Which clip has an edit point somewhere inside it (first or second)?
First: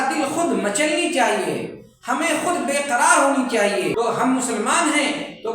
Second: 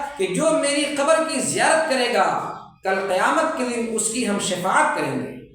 first